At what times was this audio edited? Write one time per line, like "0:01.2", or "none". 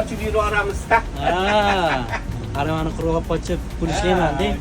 0:02.3

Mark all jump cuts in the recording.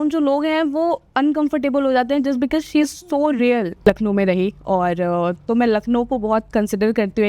0:03.8

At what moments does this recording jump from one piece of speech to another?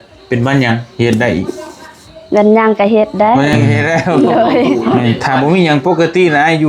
0:04.9

